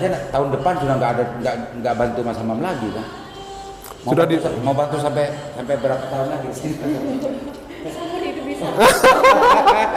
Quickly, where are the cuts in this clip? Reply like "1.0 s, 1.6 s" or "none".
none